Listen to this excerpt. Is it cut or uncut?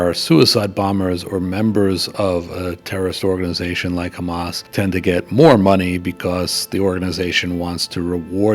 cut